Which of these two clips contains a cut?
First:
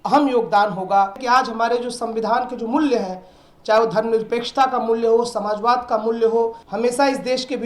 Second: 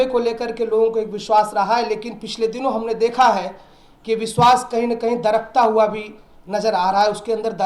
first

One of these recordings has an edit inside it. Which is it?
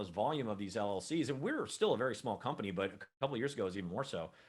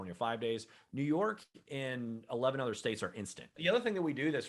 second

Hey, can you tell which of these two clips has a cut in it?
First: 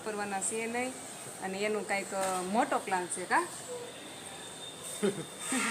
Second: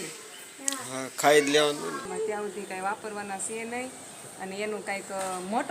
second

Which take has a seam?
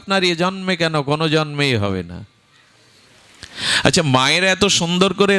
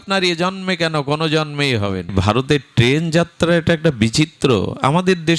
second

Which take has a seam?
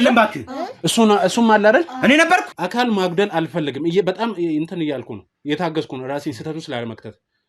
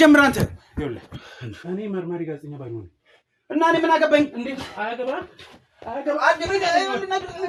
first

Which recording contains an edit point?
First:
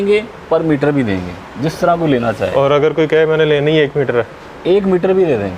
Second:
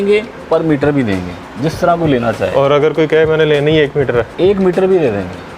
second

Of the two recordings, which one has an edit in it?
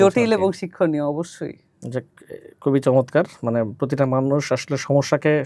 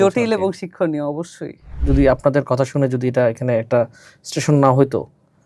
second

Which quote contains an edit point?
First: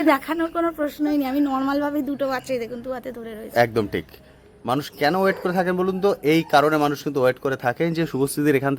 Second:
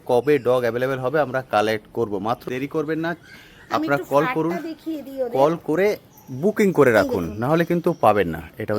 second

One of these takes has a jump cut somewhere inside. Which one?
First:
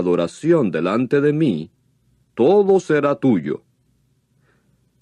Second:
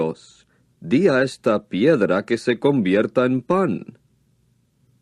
second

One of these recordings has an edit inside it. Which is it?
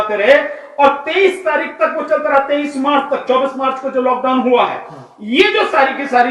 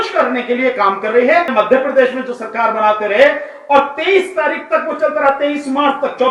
second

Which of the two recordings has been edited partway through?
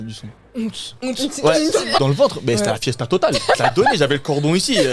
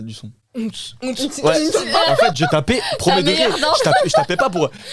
first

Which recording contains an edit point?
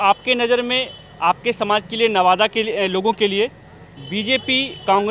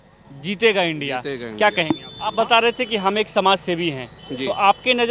second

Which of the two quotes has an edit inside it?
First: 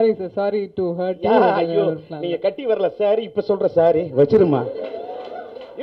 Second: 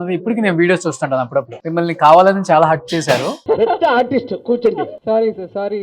second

